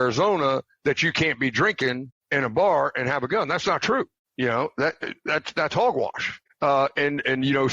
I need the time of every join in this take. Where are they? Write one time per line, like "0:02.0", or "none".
0:02.1
0:04.2
0:06.4